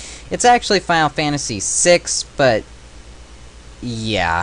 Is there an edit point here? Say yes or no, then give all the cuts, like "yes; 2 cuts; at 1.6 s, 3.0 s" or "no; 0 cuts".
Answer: yes; 1 cut; at 2.5 s